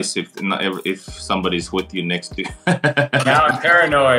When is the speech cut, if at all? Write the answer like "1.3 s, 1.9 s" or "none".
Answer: none